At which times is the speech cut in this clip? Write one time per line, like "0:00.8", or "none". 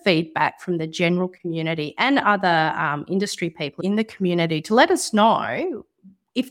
none